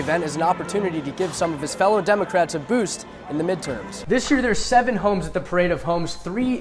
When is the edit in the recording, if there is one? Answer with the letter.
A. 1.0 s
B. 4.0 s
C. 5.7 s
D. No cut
B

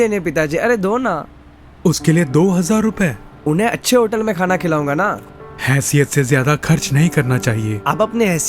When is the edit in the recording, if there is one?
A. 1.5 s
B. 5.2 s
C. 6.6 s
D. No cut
B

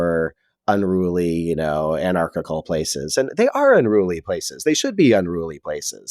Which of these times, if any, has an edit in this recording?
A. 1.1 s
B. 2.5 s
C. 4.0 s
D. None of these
D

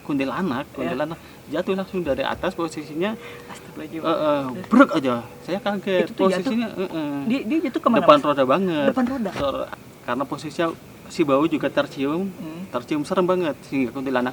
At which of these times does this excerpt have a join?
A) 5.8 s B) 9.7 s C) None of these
B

